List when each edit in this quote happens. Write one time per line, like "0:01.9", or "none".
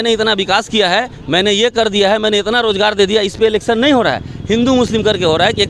none